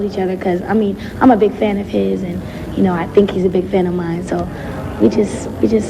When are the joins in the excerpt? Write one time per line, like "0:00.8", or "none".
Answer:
none